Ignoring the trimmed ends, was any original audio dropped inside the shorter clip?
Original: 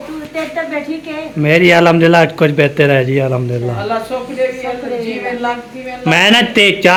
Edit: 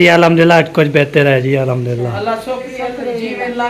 yes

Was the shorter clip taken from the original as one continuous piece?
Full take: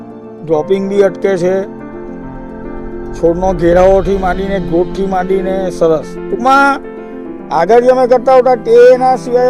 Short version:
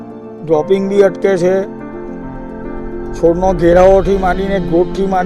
yes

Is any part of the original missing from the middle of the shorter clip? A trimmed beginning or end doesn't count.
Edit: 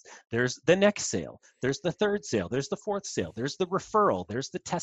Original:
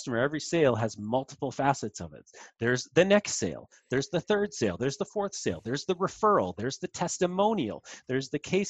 no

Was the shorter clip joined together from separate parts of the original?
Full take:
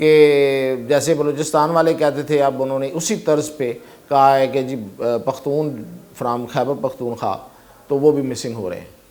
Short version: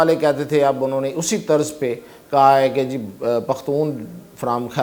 no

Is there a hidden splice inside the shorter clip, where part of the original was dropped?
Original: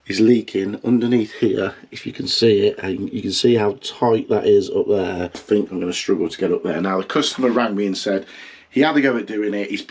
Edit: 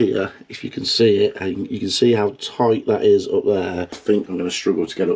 no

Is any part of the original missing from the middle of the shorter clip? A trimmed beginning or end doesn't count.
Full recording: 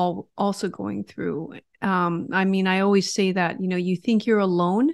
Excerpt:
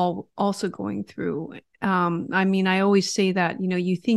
no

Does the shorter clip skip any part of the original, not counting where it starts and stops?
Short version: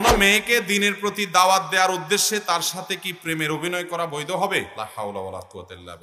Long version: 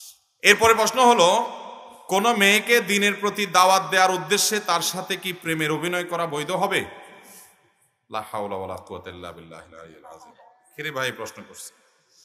yes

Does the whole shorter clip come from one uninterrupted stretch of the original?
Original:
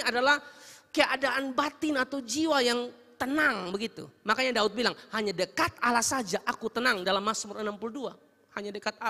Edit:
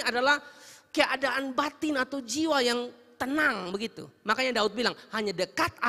yes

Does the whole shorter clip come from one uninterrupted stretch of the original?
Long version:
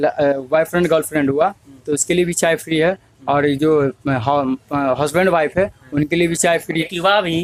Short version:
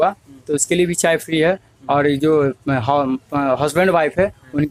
yes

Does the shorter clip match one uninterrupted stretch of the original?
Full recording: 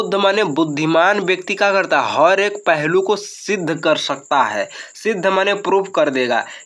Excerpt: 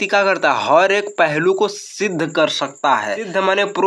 no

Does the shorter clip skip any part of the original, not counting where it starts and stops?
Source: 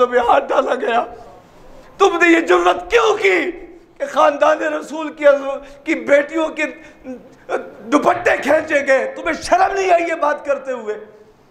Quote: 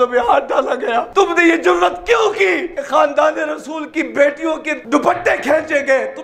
yes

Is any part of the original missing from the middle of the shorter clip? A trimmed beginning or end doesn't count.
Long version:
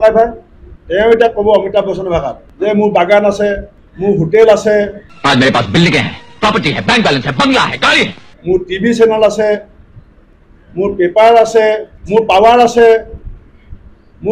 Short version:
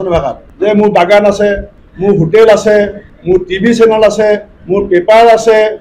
yes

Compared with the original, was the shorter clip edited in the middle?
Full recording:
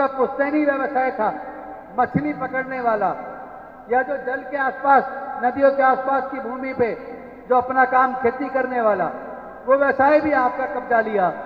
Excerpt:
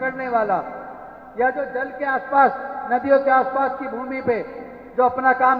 no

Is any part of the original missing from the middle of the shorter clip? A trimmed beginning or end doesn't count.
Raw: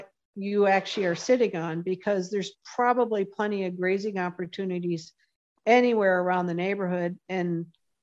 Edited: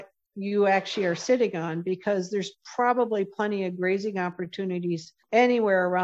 yes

